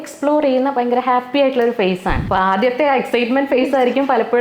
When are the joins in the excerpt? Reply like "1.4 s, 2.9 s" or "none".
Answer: 2.2 s

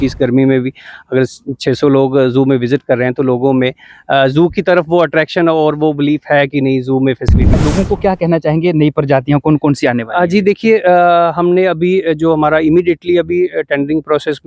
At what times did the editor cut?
7.5 s

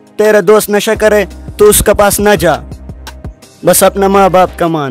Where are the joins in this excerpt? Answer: none

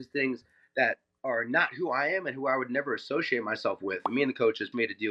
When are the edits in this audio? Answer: 4.1 s

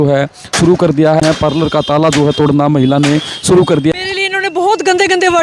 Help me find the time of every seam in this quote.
1.2 s, 3.9 s

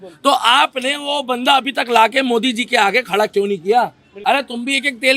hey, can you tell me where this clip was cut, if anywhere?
4.1 s

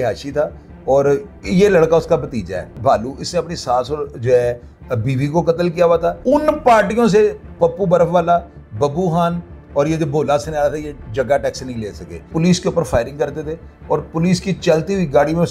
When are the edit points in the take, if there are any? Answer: 2.7 s, 6.2 s, 12.3 s

